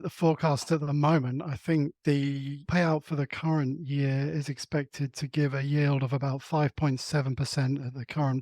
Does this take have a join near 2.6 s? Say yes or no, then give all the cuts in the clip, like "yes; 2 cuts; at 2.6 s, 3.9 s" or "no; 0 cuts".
yes; 1 cut; at 2.6 s